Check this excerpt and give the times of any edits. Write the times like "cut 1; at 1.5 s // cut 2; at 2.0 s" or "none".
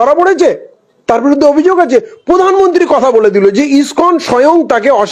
none